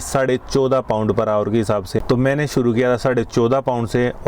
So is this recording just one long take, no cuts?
no; 1 cut; at 2.0 s

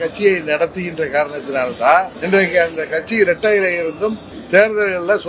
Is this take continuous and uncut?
no; 2 cuts; at 2.1 s, 4.3 s

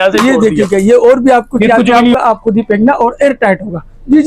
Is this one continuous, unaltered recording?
no; 1 cut; at 2.1 s

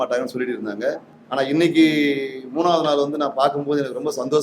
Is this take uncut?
no; 1 cut; at 1.1 s

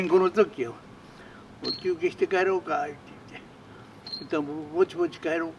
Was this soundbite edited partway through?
no; 0 cuts

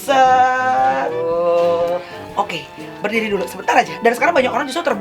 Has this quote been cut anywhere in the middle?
yes; 2 cuts; at 2.2 s, 3.9 s

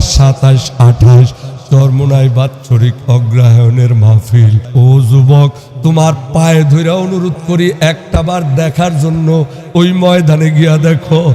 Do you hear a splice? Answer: yes; 1 cut; at 4.6 s

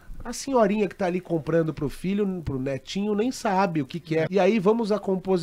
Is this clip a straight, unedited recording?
no; 1 cut; at 4.3 s

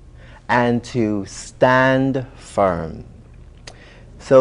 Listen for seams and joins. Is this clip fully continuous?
no; 1 cut; at 2.0 s

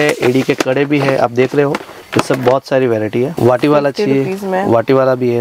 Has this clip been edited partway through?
yes; 1 cut; at 3.3 s

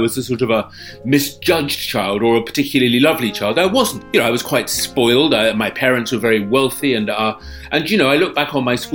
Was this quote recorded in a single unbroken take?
no; 1 cut; at 4.0 s

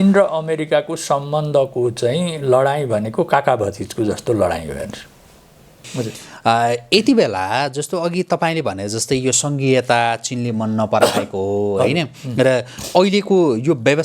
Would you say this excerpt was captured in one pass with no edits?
no; 1 cut; at 5.8 s

